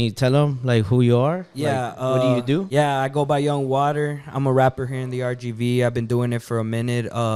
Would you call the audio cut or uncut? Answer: uncut